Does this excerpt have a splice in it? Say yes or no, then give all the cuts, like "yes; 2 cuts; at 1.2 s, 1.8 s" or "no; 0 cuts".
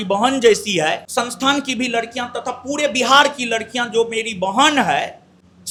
no; 0 cuts